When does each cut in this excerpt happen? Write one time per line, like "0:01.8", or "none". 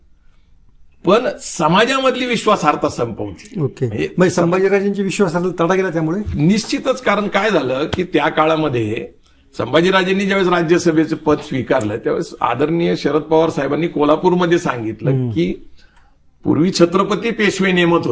none